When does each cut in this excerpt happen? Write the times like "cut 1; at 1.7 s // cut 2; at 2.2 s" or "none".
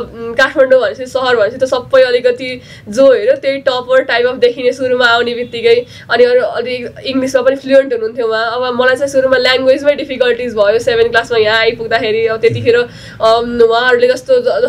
none